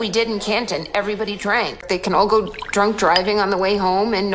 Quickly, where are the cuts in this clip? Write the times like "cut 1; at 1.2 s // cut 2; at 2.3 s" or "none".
cut 1; at 1.8 s